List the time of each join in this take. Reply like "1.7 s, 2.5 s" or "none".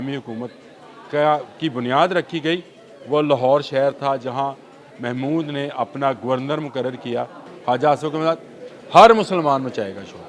7.4 s

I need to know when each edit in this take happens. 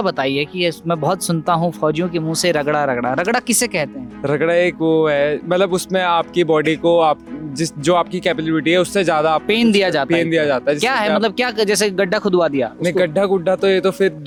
none

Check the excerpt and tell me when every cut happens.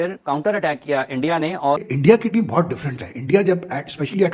1.8 s

